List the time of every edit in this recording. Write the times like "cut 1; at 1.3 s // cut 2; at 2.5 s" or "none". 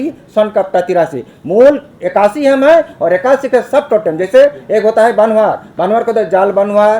none